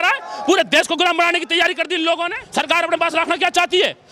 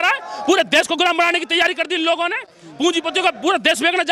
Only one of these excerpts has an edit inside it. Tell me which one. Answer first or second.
first